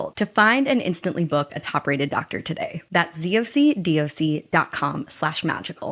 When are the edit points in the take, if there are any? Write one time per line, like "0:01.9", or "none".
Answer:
none